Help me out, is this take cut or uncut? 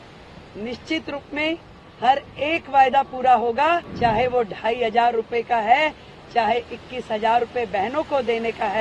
cut